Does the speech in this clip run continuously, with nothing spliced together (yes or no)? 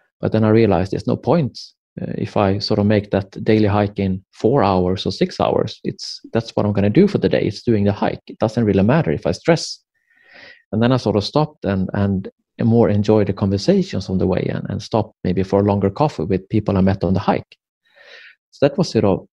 yes